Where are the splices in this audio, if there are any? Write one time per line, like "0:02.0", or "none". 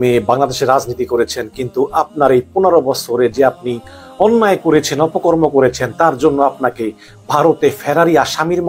none